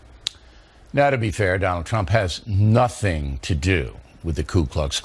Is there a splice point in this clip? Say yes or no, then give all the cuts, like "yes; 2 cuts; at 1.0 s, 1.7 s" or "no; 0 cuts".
no; 0 cuts